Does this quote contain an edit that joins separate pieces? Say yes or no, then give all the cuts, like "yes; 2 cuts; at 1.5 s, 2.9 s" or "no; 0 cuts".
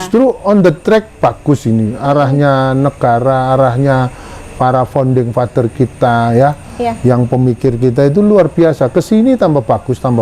no; 0 cuts